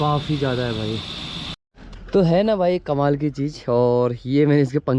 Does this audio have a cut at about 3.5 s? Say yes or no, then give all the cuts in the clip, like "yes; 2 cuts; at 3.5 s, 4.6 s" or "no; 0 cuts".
no; 1 cut; at 1.6 s